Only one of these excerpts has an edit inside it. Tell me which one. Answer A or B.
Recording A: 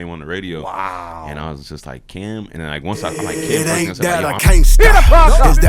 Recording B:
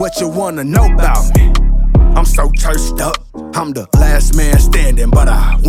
A